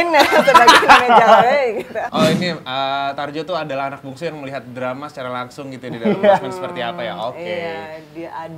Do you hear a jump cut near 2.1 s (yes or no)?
yes